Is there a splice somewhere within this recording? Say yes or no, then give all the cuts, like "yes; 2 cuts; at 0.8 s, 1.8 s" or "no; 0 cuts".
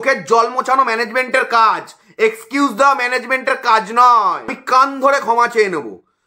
yes; 1 cut; at 4.6 s